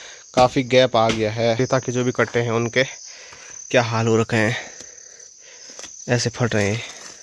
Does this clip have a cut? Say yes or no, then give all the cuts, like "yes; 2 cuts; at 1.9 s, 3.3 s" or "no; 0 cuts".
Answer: yes; 1 cut; at 1.6 s